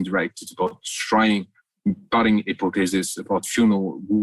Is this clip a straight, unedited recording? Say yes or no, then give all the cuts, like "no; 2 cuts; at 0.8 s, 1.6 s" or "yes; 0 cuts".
yes; 0 cuts